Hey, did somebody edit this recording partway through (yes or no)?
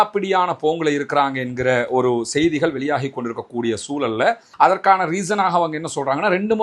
yes